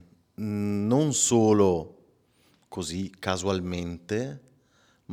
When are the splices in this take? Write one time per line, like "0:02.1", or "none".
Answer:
none